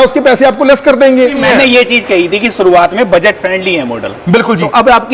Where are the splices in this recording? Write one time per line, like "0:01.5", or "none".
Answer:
0:01.4